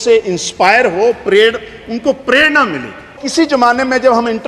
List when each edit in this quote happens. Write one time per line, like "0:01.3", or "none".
0:03.2